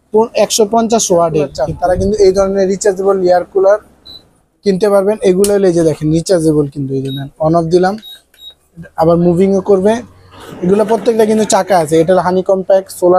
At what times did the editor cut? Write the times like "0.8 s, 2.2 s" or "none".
1.6 s

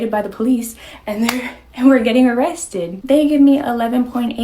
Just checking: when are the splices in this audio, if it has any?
2.9 s

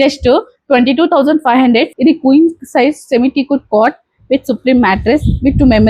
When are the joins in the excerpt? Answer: 1.9 s

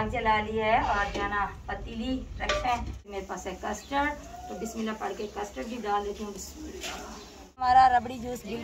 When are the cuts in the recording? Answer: 3.1 s, 7.6 s

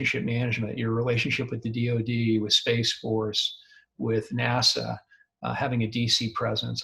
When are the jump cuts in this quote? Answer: none

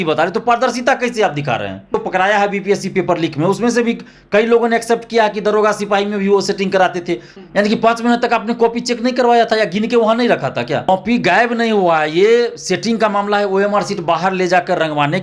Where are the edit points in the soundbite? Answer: 2.0 s, 7.3 s, 10.9 s

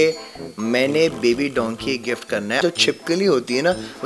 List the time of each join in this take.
2.6 s

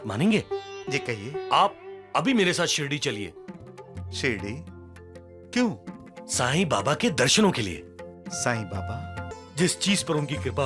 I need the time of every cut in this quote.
9.3 s

